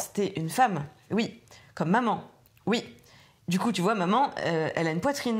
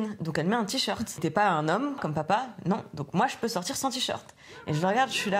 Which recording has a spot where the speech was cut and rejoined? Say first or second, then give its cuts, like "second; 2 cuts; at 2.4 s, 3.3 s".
second; 2 cuts; at 1.2 s, 2.0 s